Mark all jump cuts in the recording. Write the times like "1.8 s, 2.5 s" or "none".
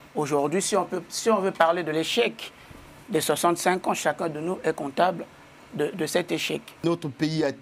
6.7 s